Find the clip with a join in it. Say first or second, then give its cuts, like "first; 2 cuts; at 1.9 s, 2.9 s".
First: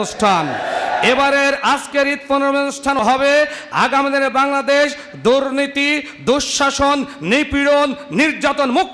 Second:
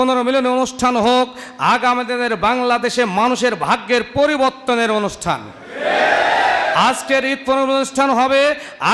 first; 1 cut; at 3.0 s